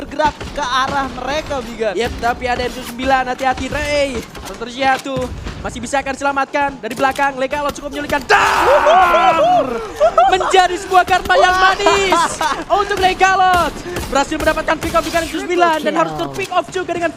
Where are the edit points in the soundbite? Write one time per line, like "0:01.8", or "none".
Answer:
none